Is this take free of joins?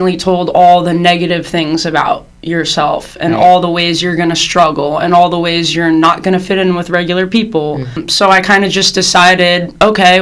no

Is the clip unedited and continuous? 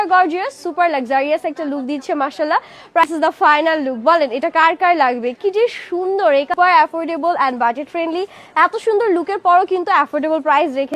no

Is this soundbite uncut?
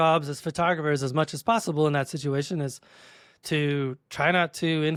yes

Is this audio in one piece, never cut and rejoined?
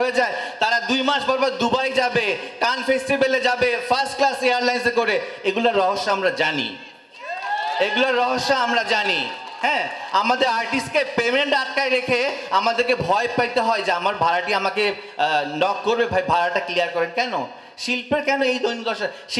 yes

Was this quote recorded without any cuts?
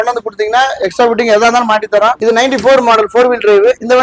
no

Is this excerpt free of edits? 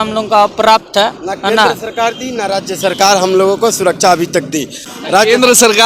no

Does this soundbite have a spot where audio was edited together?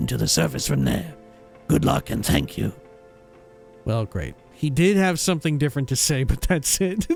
no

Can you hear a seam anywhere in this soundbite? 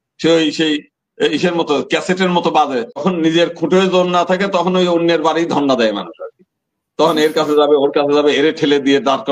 yes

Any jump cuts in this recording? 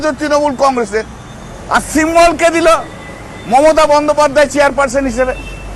no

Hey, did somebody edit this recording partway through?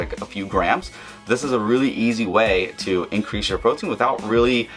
no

